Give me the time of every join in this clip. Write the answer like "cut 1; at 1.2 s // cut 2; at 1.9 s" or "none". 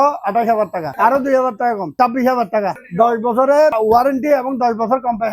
cut 1; at 0.9 s // cut 2; at 1.9 s // cut 3; at 2.8 s // cut 4; at 3.8 s